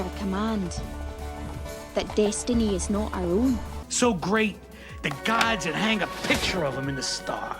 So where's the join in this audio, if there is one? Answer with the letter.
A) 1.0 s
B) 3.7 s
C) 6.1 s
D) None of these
B